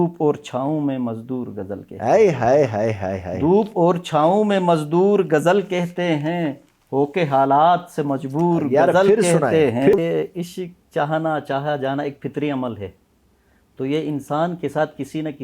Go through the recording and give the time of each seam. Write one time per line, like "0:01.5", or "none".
0:10.0